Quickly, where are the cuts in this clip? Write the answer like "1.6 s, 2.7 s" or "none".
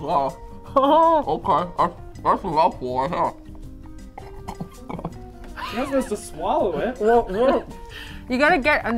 none